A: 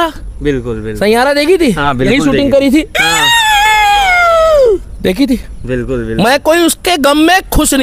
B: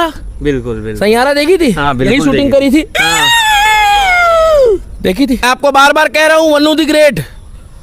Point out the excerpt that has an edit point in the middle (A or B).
B